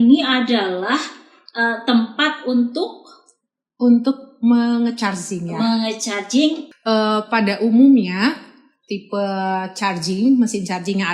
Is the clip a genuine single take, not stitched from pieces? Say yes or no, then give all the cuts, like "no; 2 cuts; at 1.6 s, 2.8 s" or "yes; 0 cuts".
no; 1 cut; at 6.7 s